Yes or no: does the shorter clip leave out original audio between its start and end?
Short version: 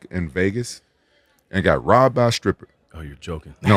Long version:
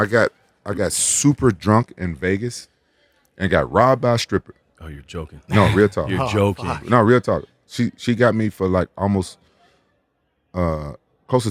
no